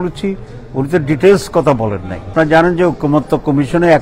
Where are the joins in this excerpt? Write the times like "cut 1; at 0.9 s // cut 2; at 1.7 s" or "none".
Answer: cut 1; at 2.1 s